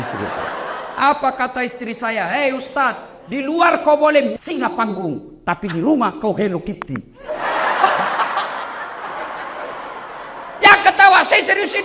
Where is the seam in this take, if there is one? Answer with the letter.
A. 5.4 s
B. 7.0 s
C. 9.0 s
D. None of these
C